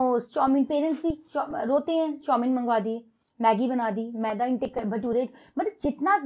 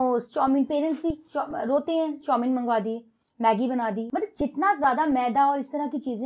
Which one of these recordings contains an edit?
second; 1 cut; at 4.0 s

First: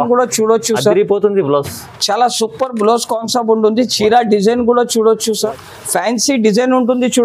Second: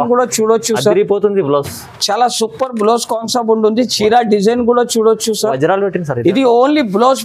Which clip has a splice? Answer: first; 1 cut; at 5.5 s

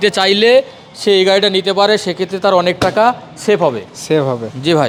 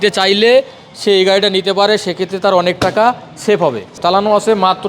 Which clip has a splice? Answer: second; 1 cut; at 3.9 s

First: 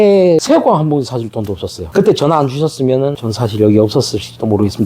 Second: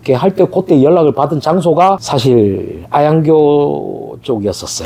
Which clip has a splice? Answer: first; 1 cut; at 1.8 s

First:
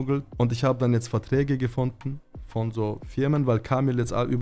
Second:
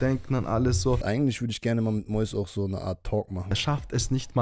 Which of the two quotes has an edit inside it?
second; 2 cuts; at 1.0 s, 3.5 s

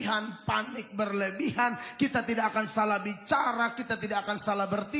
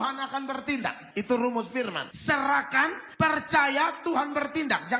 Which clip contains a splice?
second; 3 cuts; at 1.0 s, 2.1 s, 3.0 s

